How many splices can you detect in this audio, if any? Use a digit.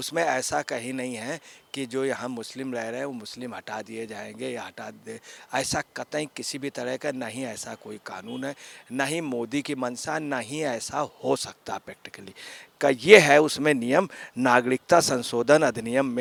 0